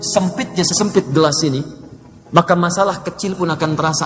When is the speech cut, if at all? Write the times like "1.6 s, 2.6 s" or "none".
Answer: none